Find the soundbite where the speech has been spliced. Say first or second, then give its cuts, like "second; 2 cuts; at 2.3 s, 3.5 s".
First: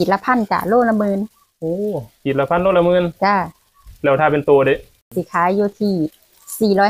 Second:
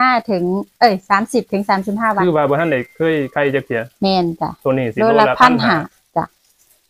first; 1 cut; at 5.1 s